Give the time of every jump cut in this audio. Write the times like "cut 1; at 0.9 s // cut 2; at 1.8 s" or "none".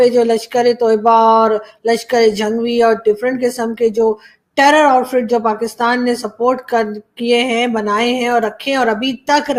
none